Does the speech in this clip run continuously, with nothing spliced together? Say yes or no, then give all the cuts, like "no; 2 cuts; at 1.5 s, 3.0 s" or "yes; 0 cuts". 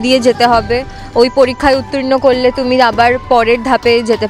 yes; 0 cuts